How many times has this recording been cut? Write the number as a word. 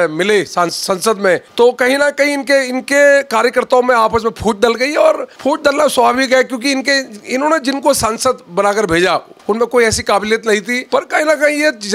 four